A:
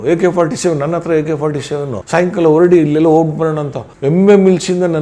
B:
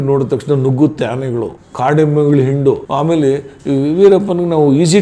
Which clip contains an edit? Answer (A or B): B